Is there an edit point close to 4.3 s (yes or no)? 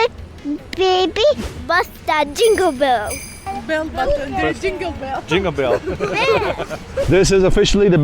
no